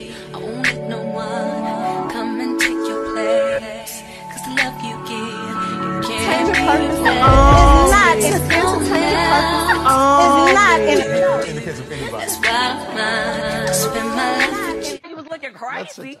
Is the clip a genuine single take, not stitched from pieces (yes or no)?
no